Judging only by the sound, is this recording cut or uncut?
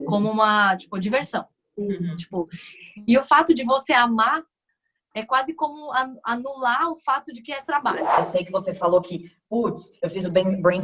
cut